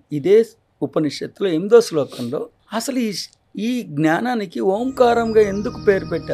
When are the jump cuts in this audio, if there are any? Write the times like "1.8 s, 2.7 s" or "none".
2.6 s